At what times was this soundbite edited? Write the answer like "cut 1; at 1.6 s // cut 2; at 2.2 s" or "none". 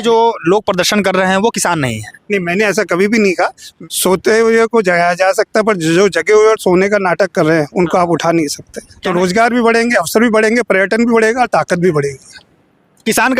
cut 1; at 3.6 s // cut 2; at 8.9 s

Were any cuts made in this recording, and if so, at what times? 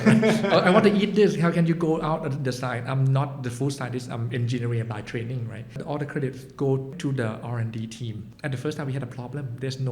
cut 1; at 5.8 s // cut 2; at 6.9 s // cut 3; at 8.2 s

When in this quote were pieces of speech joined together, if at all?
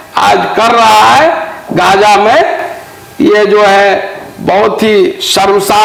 none

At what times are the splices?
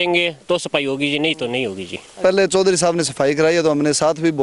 cut 1; at 2.2 s

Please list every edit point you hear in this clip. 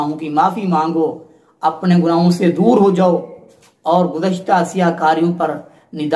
none

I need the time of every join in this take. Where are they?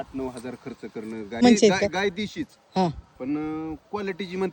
cut 1; at 1.4 s

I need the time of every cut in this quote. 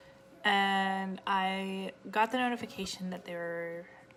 none

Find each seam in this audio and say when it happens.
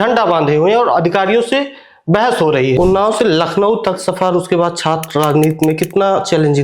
cut 1; at 2.8 s

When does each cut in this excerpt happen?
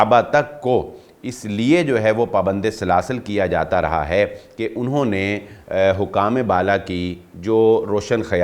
none

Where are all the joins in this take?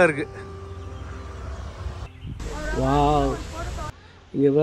cut 1; at 2.4 s

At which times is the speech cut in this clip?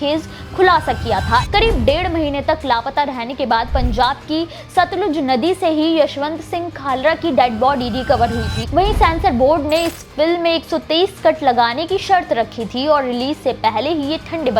cut 1; at 1.5 s // cut 2; at 8.6 s

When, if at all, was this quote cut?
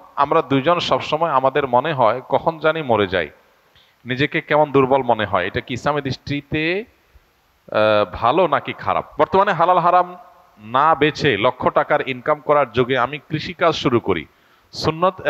cut 1; at 9.1 s

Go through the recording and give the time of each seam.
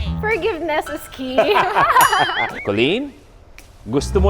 cut 1; at 2.5 s

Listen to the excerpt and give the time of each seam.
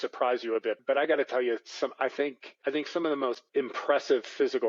none

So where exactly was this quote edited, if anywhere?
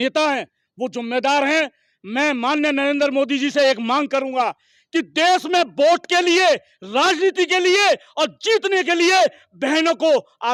none

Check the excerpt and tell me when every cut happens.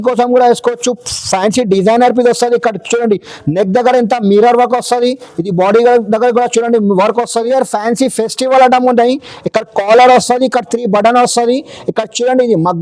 cut 1; at 7.5 s

